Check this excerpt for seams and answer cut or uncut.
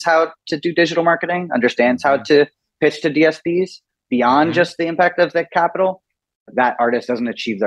cut